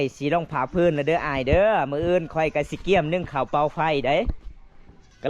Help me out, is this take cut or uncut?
uncut